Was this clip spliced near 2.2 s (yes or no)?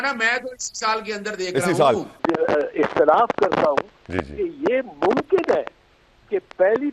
yes